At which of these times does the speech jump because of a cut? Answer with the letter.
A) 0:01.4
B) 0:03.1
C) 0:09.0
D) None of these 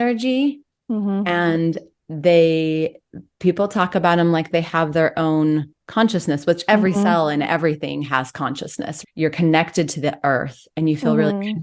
C